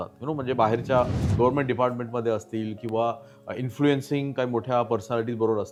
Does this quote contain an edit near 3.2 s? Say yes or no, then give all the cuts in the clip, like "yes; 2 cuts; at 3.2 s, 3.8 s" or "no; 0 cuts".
no; 0 cuts